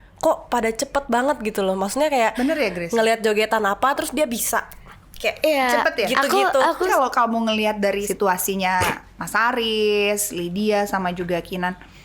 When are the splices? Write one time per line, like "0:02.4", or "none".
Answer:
0:06.9
0:08.1